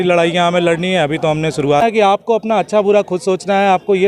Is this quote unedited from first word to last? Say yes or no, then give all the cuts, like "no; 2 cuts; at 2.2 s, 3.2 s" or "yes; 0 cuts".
no; 1 cut; at 1.8 s